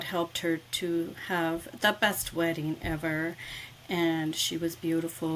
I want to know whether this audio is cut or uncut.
uncut